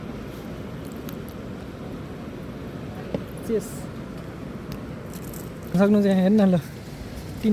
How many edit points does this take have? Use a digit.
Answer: 1